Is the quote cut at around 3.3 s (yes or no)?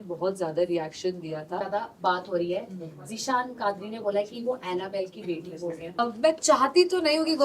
no